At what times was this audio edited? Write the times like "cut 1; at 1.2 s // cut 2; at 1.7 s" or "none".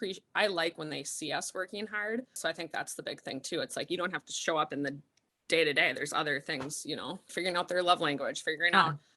cut 1; at 2.3 s // cut 2; at 7.3 s